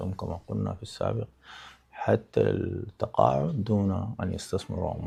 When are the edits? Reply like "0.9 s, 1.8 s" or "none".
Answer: none